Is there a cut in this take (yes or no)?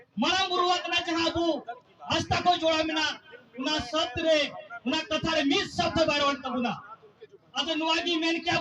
no